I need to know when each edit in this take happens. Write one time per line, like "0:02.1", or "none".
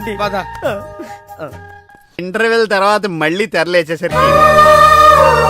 0:02.2

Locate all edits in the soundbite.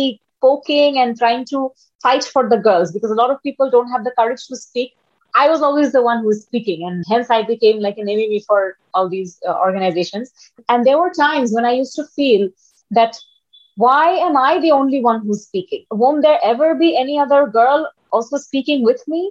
0:07.0
0:10.6
0:15.8

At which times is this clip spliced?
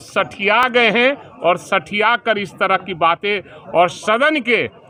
none

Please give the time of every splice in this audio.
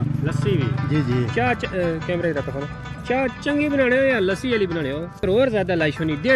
0:05.1

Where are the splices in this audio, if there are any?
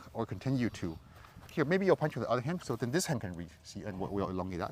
0:01.5

